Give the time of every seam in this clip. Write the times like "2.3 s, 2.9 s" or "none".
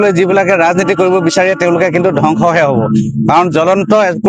none

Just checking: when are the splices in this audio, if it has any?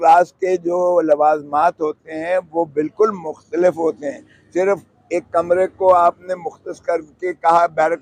none

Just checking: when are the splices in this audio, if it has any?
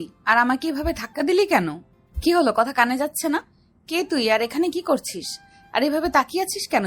2.1 s

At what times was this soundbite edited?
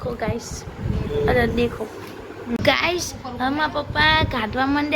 2.6 s

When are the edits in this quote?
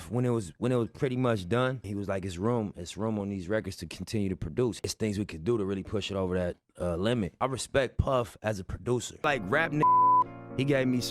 6.6 s, 9.1 s

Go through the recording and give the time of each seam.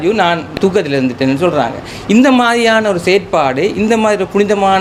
none

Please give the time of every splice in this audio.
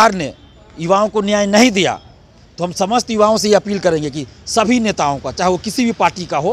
none

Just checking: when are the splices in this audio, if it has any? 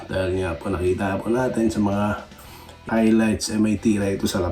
2.8 s

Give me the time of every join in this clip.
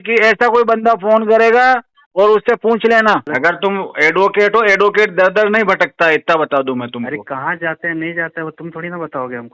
3.3 s

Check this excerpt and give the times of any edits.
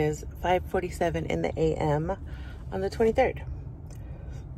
none

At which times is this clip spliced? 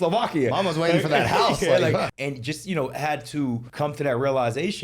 2.1 s, 3.7 s

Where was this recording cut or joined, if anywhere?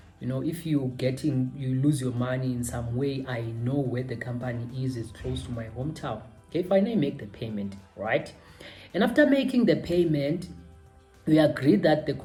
none

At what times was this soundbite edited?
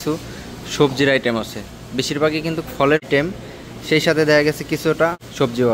none

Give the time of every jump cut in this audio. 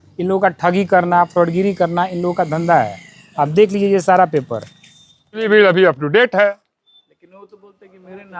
5.4 s

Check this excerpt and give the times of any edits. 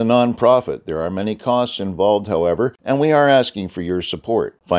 2.8 s

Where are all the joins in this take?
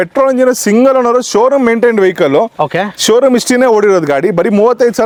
none

